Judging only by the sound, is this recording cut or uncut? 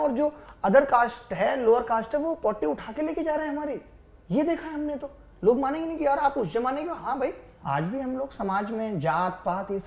cut